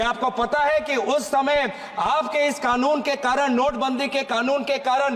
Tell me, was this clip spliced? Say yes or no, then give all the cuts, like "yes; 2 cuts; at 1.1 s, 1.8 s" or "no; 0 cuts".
no; 0 cuts